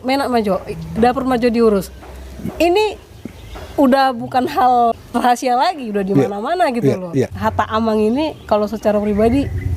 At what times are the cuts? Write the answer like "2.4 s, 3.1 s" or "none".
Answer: 7.3 s